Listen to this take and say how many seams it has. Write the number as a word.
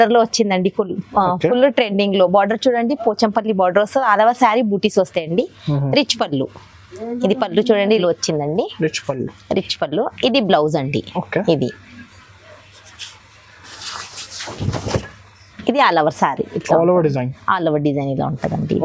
one